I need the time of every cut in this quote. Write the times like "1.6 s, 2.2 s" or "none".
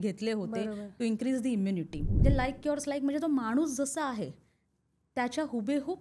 2.1 s